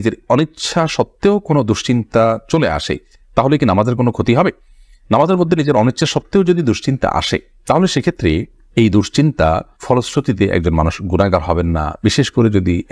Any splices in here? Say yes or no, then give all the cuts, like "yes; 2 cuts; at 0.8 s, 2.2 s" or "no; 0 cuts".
no; 0 cuts